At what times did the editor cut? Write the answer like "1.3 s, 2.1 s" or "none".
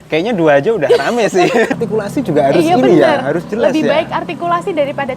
1.7 s

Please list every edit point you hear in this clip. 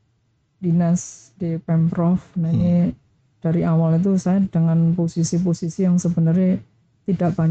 none

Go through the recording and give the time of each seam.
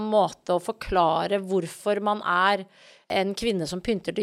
3.1 s

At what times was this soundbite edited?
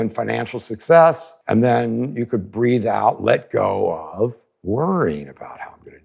1.3 s, 4.5 s

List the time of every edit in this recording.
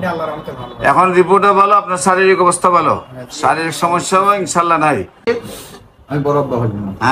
5.4 s

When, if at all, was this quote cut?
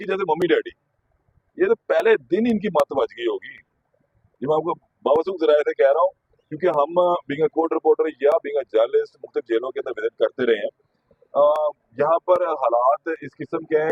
none

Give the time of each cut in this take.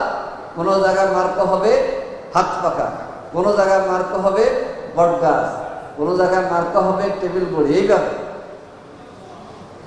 none

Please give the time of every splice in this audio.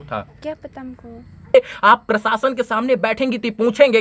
1.5 s

